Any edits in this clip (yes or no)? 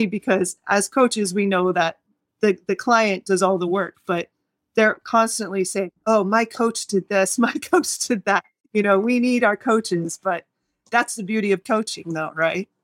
no